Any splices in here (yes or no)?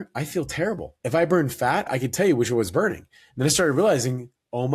yes